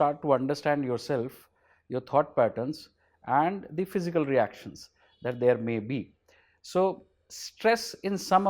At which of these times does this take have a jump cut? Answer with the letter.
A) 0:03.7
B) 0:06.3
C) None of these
C